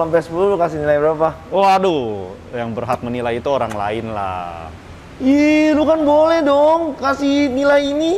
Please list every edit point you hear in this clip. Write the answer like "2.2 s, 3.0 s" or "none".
none